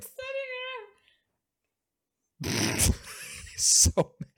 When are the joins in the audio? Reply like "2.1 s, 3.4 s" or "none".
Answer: none